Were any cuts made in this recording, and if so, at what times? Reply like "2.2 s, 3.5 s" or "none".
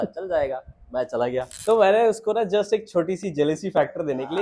1.5 s